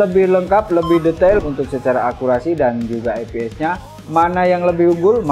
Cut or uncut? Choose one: cut